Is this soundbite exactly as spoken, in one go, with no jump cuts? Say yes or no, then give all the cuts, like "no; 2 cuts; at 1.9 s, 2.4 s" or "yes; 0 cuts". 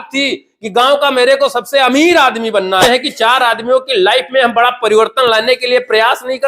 no; 1 cut; at 2.8 s